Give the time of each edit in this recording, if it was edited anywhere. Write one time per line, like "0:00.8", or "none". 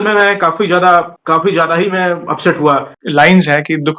0:02.9